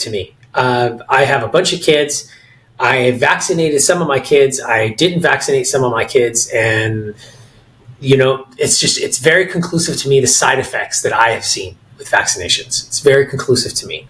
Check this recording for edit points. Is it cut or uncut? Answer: uncut